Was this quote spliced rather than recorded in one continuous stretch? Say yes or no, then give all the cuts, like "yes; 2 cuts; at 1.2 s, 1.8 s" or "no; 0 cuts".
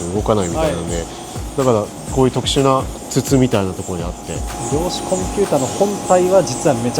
yes; 3 cuts; at 1.4 s, 3.0 s, 4.5 s